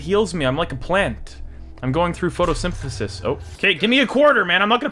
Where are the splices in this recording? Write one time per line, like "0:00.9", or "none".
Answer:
0:03.5